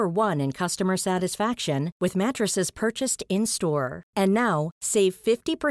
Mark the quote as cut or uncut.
uncut